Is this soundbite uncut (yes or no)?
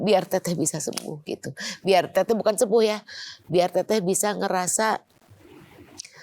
yes